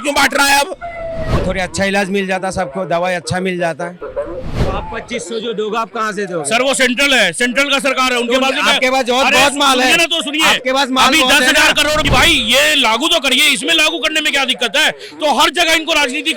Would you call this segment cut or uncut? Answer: cut